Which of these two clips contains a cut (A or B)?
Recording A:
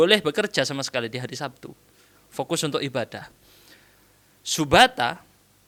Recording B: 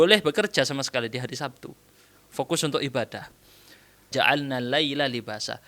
B